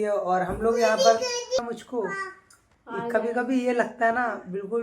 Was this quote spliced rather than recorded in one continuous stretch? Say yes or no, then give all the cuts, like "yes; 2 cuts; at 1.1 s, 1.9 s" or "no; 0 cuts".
yes; 1 cut; at 1.6 s